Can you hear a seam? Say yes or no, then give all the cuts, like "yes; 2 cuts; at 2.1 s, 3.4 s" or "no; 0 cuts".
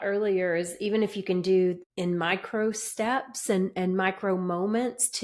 yes; 1 cut; at 1.9 s